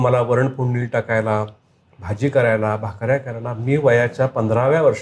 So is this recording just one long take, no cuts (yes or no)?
yes